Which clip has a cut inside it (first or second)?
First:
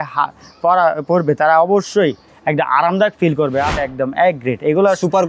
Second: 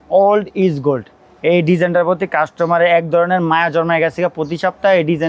first